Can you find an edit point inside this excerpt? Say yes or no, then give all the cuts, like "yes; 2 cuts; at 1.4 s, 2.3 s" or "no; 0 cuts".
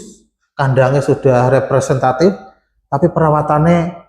no; 0 cuts